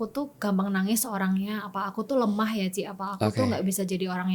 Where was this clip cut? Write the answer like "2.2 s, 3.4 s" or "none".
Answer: none